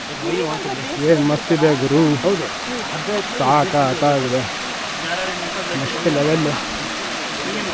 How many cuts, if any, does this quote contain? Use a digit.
0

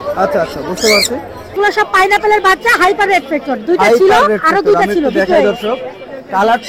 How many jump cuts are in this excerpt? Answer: 1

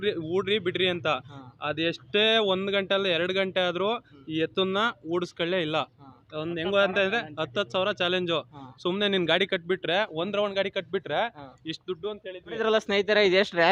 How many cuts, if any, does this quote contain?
1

